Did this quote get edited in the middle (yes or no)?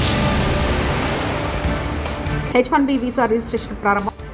yes